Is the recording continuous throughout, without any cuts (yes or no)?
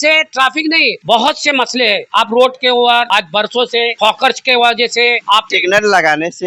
no